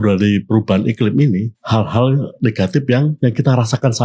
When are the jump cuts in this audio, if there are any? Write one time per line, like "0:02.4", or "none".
0:01.6
0:03.2